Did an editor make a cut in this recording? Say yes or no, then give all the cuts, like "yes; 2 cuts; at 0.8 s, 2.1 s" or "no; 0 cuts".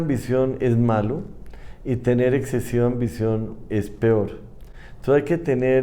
no; 0 cuts